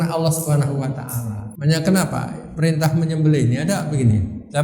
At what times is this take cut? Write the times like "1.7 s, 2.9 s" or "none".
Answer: 1.5 s